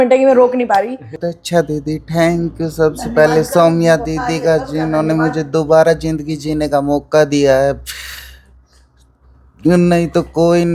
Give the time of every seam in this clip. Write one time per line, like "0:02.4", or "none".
0:01.3